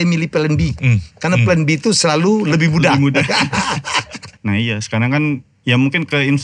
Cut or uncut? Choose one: cut